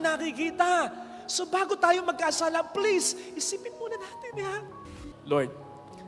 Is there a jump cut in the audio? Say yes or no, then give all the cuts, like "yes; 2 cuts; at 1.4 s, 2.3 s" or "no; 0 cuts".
yes; 1 cut; at 5.0 s